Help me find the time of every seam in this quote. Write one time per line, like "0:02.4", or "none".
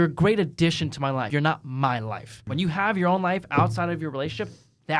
0:01.3
0:02.4